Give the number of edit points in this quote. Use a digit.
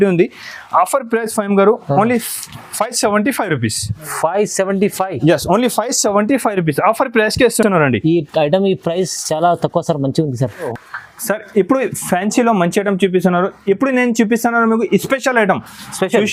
0